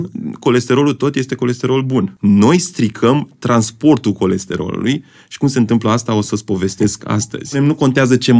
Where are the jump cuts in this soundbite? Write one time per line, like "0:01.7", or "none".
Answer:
0:02.1
0:07.5